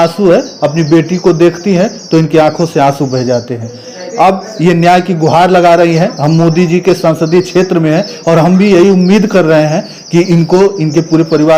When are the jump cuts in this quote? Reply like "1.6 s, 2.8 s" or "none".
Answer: none